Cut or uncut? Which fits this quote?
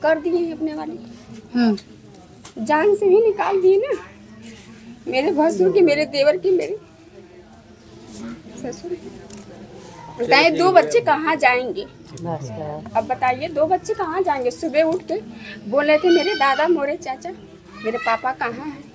uncut